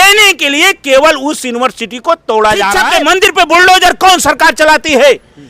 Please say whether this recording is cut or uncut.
cut